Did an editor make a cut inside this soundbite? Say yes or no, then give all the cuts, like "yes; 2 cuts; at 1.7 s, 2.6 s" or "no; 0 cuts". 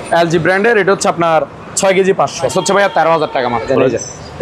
yes; 2 cuts; at 2.5 s, 3.7 s